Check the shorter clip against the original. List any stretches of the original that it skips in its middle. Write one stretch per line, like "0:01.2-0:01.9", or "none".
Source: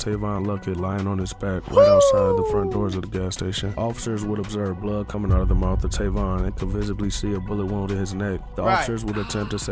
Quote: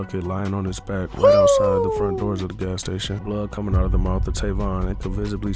0:03.7-0:04.8